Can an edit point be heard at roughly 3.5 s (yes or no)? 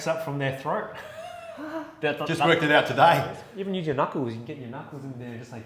yes